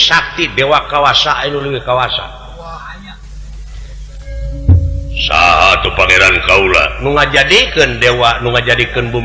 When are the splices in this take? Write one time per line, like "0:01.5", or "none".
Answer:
0:04.3